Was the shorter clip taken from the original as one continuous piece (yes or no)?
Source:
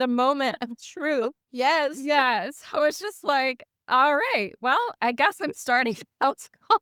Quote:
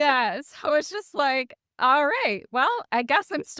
yes